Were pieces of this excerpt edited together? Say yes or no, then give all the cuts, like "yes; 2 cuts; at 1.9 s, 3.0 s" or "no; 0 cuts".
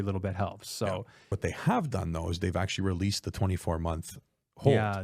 yes; 1 cut; at 1.3 s